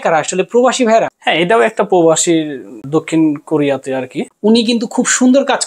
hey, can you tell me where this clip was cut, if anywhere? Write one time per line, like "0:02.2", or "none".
0:01.2
0:02.7
0:04.2